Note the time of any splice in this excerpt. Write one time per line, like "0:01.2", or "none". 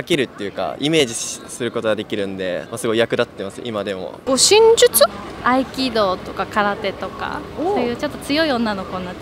0:02.7
0:04.1